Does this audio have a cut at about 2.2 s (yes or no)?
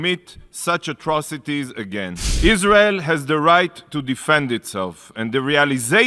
yes